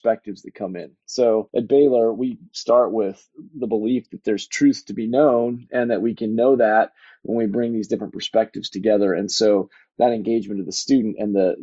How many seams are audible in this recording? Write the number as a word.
one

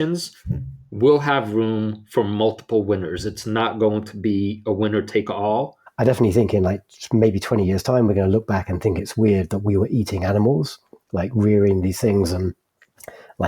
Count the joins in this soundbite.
two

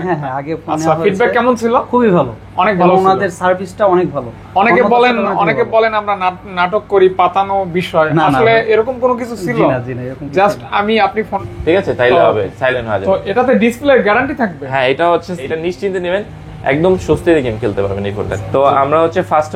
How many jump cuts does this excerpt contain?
three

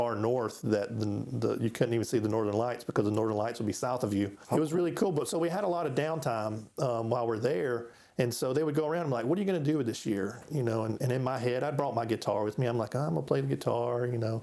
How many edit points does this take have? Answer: one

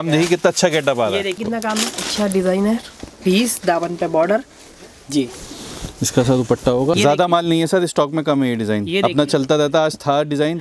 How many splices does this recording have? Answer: two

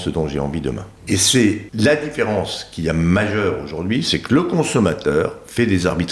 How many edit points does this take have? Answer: two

